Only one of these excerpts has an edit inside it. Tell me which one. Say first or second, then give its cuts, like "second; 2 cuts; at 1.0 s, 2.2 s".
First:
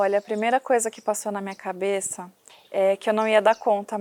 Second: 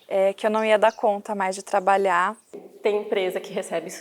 second; 1 cut; at 2.4 s